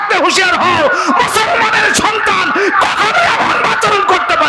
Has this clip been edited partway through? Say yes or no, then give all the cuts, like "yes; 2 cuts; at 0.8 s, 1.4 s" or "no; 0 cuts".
no; 0 cuts